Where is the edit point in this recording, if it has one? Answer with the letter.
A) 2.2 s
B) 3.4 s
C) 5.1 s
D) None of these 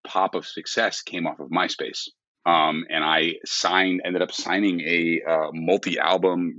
D